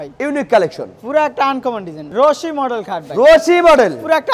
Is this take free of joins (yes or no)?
no